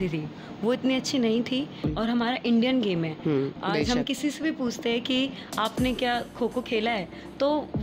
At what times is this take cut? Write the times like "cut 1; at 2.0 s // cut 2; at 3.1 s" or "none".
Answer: cut 1; at 1.8 s

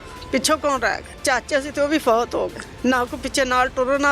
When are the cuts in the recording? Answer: cut 1; at 1.1 s // cut 2; at 2.6 s

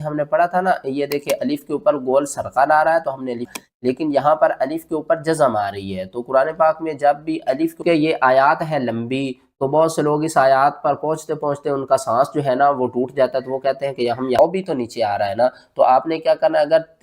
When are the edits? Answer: cut 1; at 3.5 s // cut 2; at 7.8 s // cut 3; at 14.4 s

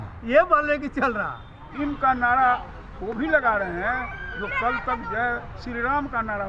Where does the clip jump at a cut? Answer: cut 1; at 1.7 s

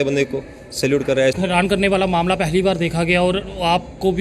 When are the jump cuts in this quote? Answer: cut 1; at 1.4 s

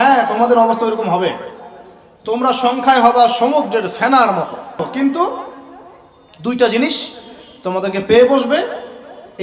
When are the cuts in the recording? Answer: cut 1; at 4.8 s

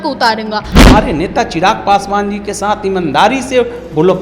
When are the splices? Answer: cut 1; at 0.9 s

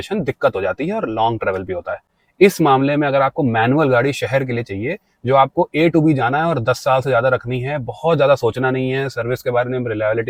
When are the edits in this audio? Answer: none

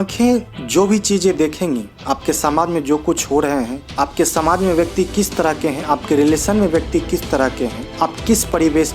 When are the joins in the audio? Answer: cut 1; at 3.8 s // cut 2; at 7.8 s

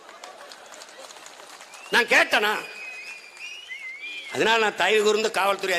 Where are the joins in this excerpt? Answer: cut 1; at 4.3 s

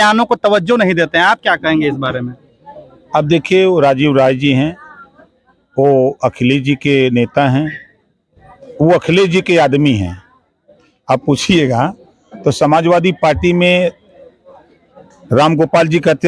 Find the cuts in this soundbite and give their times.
none

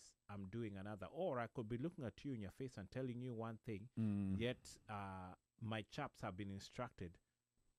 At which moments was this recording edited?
none

